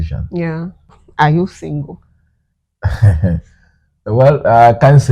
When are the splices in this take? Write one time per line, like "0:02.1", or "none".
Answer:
0:01.0